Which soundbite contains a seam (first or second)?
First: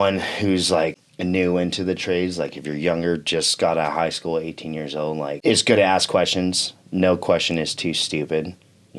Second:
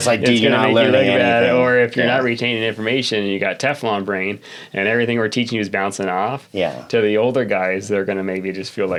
first